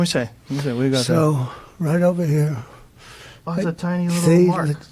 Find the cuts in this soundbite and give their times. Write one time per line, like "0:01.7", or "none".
0:04.0